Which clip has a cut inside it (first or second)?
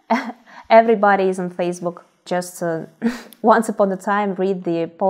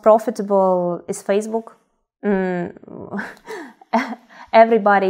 first